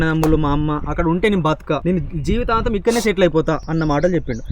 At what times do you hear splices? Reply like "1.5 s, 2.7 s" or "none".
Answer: 1.8 s, 3.7 s